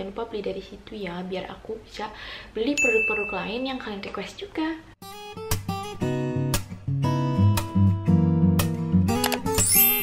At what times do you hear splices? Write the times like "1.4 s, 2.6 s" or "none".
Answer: 4.9 s